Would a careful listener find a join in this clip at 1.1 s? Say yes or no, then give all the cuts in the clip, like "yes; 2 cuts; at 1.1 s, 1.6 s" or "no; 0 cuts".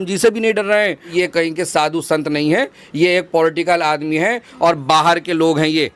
yes; 1 cut; at 1.1 s